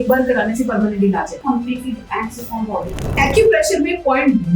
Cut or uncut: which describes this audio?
cut